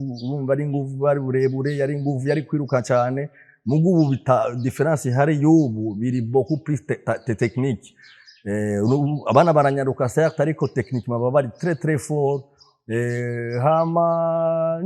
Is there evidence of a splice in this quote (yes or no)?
no